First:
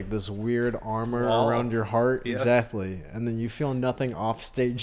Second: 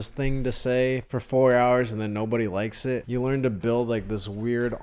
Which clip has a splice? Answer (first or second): second